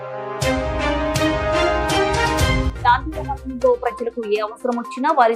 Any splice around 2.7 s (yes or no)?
yes